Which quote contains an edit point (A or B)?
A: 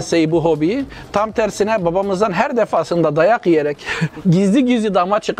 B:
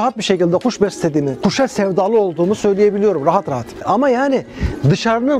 B